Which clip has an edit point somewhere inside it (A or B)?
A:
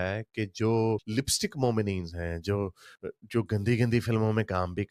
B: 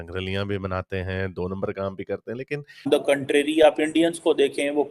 B